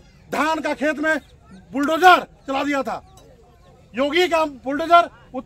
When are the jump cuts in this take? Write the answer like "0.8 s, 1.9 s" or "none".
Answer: none